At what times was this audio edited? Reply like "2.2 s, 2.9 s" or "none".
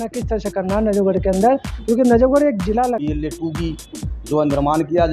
3.0 s